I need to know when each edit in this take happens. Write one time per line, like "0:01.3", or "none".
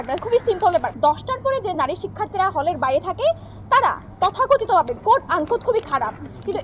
0:00.9